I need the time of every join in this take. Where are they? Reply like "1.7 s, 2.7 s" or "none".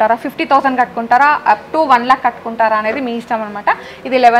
none